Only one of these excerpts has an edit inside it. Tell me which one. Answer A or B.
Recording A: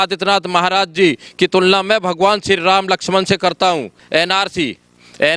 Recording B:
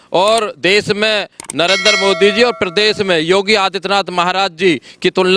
A